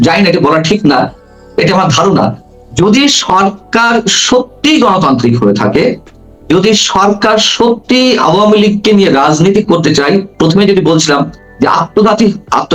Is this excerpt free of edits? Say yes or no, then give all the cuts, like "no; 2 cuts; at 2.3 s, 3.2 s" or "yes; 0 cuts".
yes; 0 cuts